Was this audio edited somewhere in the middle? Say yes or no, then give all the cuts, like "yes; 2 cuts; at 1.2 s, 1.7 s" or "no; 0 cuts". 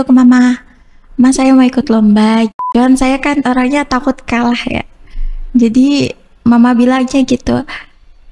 yes; 1 cut; at 2.6 s